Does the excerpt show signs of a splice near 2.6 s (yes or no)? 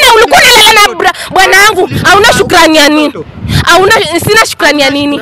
no